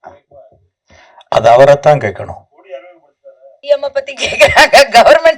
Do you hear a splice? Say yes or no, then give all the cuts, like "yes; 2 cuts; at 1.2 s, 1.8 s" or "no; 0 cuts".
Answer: yes; 1 cut; at 3.6 s